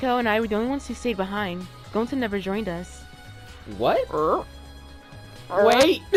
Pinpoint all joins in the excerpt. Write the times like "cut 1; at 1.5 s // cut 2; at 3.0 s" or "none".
none

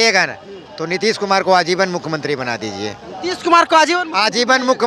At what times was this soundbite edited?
none

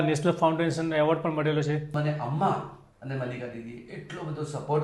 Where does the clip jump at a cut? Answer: cut 1; at 2.0 s

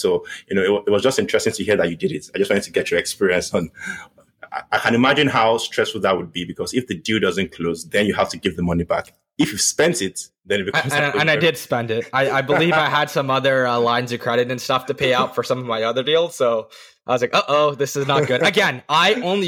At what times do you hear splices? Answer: none

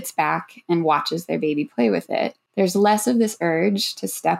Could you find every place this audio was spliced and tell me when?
cut 1; at 2.4 s

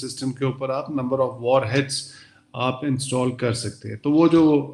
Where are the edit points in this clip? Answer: none

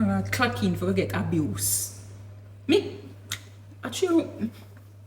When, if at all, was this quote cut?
none

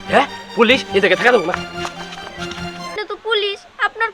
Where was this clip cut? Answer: cut 1; at 2.9 s

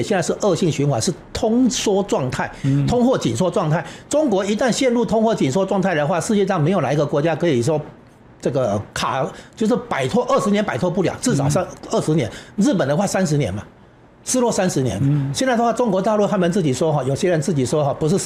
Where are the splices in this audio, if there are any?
none

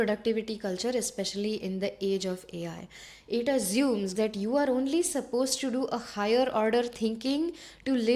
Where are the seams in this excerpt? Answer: none

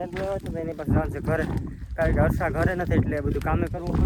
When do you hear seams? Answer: none

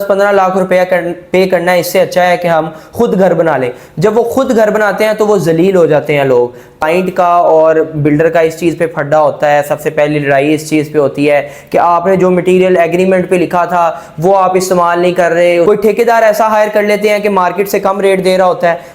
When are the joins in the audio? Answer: cut 1; at 6.8 s // cut 2; at 15.6 s

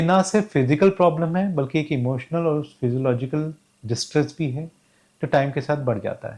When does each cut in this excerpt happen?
none

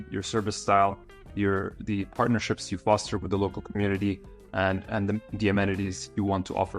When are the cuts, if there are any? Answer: none

